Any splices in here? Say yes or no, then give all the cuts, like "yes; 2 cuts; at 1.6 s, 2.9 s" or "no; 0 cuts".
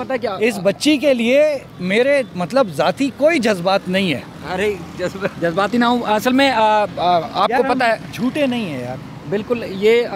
yes; 3 cuts; at 1.7 s, 4.3 s, 5.3 s